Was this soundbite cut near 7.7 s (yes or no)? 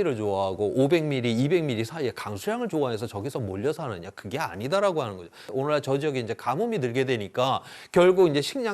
no